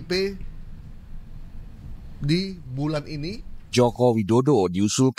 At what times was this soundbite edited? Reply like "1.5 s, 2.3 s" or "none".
3.7 s